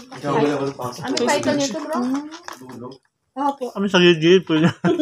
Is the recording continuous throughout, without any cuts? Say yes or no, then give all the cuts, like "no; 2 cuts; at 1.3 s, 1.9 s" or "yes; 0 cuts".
no; 1 cut; at 3.8 s